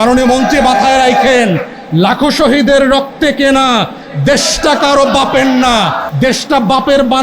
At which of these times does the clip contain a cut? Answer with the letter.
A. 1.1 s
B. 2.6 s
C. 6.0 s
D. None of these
C